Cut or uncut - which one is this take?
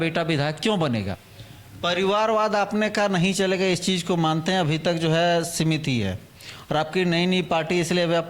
cut